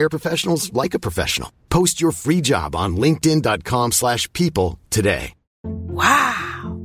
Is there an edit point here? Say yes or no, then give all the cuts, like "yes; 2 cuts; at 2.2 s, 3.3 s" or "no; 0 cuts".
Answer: no; 0 cuts